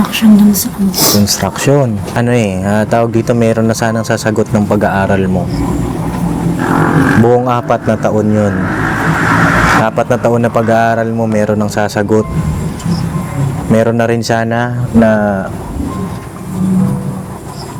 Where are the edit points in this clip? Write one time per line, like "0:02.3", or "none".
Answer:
0:02.1